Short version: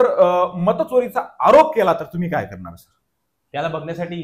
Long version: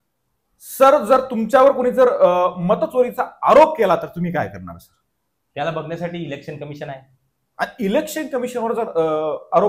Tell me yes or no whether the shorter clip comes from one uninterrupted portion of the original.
yes